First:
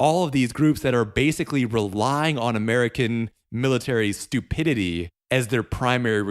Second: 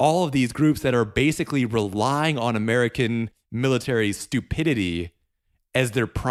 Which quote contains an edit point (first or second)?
first